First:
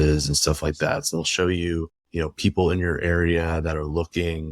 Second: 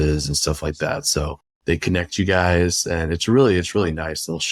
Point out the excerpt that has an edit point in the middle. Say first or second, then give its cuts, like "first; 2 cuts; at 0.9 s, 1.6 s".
first; 1 cut; at 1.1 s